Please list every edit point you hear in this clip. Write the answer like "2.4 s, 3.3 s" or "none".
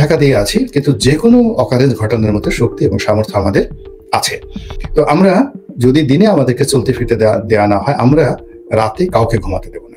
none